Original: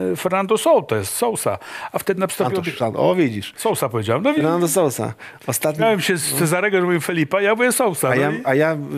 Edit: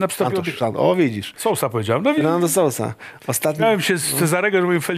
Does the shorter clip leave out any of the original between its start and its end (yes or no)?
no